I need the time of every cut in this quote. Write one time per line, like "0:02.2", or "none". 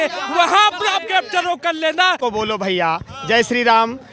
0:02.2